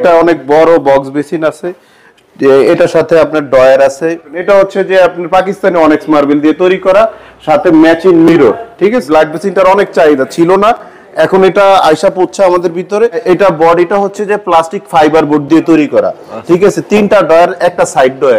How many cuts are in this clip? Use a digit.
3